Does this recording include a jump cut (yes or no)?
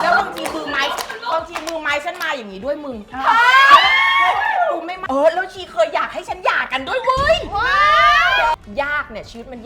yes